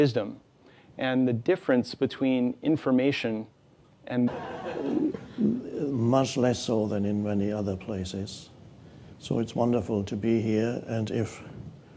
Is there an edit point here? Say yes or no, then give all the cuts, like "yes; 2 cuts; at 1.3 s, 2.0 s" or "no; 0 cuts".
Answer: no; 0 cuts